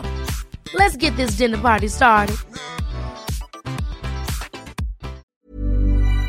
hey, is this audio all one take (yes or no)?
no